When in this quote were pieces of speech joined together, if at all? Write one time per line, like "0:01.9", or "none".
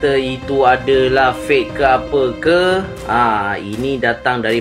none